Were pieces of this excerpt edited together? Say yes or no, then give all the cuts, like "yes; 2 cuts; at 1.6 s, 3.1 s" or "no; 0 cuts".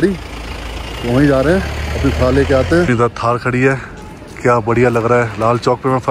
yes; 1 cut; at 2.9 s